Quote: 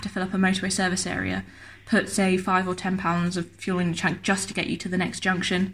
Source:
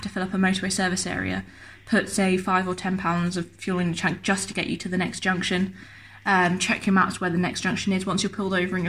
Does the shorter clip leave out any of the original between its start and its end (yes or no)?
no